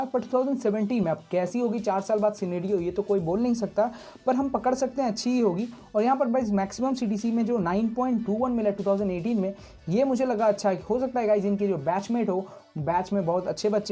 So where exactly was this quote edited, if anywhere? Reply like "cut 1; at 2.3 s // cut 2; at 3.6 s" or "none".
none